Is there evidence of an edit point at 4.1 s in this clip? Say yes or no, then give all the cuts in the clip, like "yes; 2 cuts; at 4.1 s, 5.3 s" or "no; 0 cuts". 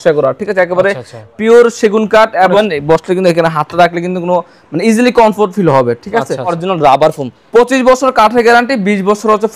no; 3 cuts; at 2.5 s, 6.6 s, 7.3 s